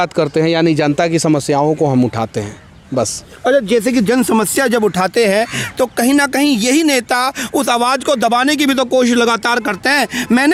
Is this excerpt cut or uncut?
uncut